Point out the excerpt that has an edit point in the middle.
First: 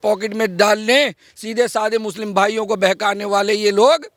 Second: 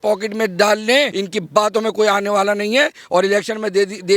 second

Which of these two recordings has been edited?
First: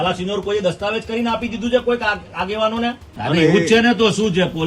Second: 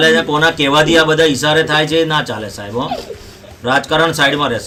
first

